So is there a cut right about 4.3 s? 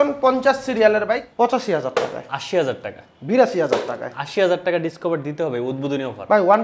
no; 1 cut; at 1.3 s

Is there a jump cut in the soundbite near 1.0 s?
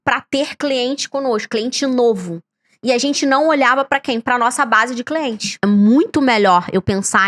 no; 1 cut; at 5.6 s

